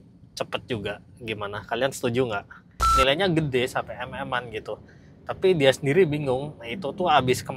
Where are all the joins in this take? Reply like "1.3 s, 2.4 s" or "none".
2.8 s